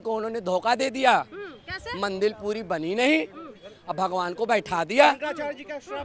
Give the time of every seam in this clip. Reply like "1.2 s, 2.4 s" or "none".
none

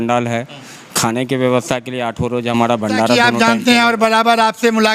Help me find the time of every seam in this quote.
3.1 s

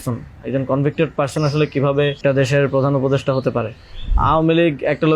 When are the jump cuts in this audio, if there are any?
2.2 s, 4.1 s

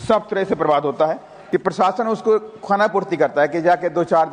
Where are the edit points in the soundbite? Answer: 1.3 s

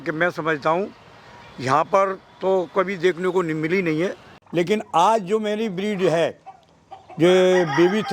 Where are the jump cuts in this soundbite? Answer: 4.3 s

